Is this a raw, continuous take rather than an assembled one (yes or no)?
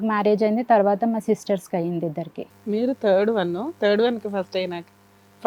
yes